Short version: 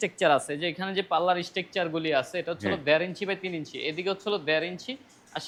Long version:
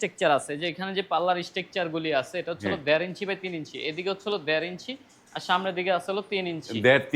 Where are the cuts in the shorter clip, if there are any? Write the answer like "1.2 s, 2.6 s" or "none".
none